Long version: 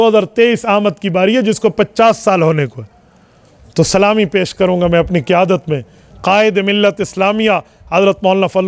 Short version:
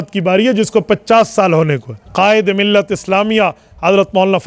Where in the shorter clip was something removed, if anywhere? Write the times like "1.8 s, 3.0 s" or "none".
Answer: 1.9 s